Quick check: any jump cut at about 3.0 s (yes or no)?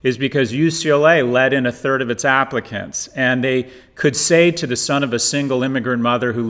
no